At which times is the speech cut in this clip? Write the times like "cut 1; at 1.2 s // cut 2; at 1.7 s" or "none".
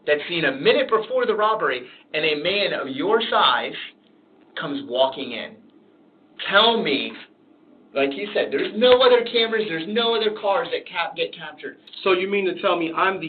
cut 1; at 11.8 s